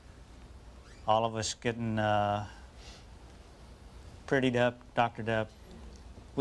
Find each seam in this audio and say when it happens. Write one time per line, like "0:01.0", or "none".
none